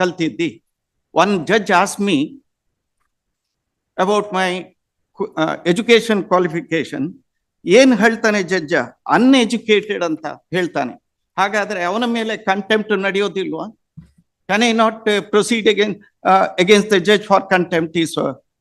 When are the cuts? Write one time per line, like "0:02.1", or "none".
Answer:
none